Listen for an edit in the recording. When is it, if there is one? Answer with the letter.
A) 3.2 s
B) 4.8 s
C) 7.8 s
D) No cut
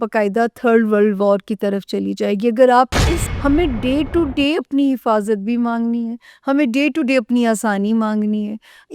A